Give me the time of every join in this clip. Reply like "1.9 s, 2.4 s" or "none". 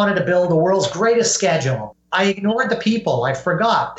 none

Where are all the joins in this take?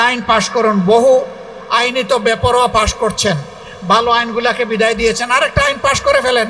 none

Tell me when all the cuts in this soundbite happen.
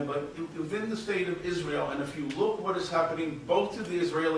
1.5 s

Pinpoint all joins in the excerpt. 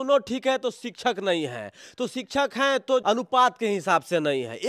3.0 s

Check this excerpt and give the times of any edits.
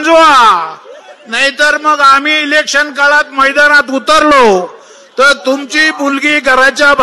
none

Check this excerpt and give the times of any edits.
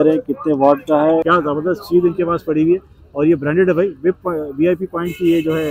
1.2 s

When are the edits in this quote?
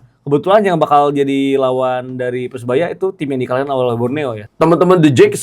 4.4 s

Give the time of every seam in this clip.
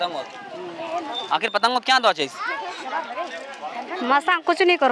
none

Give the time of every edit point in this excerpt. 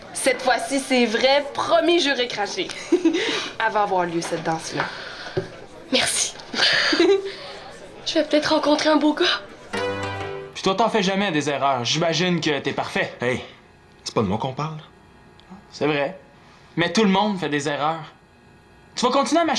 10.2 s

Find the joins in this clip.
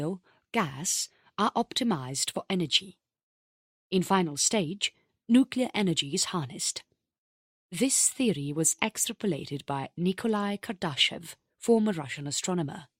2.0 s

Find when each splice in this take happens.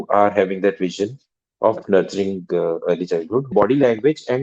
3.5 s

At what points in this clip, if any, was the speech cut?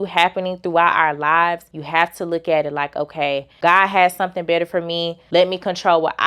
1.7 s, 3.5 s, 5.2 s

